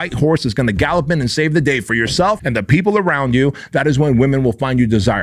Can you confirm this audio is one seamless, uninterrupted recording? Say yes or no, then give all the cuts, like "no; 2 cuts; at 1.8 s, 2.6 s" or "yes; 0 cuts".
no; 1 cut; at 2.4 s